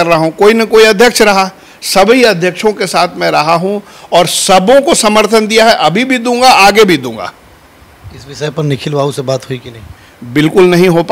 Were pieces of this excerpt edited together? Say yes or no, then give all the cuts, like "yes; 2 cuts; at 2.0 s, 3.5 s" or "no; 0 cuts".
no; 0 cuts